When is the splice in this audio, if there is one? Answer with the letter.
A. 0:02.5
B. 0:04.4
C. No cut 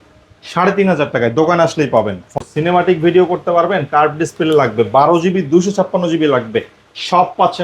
A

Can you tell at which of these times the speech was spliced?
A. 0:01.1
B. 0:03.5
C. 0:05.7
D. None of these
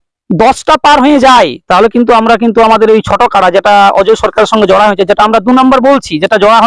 D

